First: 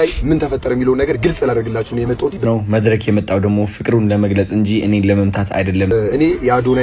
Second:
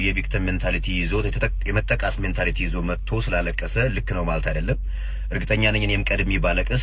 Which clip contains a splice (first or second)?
first